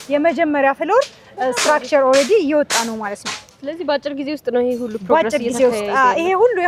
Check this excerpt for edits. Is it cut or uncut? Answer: uncut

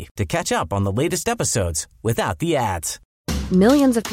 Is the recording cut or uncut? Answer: cut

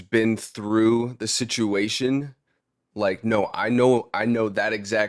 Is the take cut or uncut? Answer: uncut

